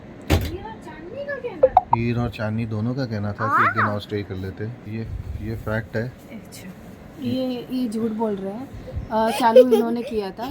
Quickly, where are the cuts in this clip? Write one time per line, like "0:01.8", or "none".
0:04.8